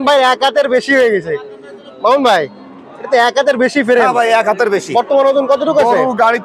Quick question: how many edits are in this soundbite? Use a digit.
0